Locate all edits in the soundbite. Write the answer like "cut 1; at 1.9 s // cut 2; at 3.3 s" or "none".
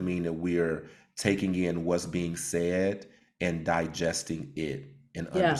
none